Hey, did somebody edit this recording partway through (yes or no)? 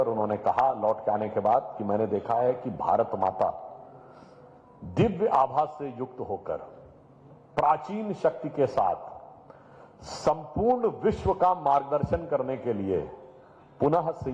no